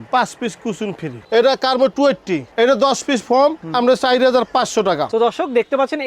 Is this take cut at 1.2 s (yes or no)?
yes